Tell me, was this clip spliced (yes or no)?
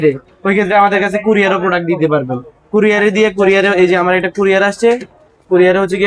no